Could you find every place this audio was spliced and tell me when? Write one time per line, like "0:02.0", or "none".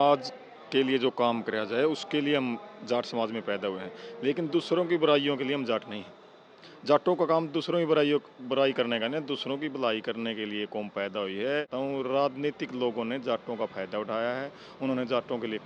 0:11.7